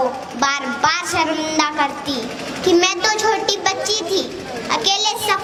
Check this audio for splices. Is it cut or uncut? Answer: uncut